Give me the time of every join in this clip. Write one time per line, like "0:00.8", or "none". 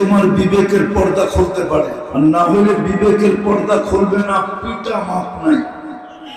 0:02.0